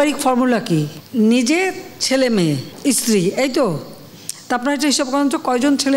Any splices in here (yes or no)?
yes